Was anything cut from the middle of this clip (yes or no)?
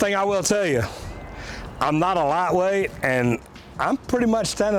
no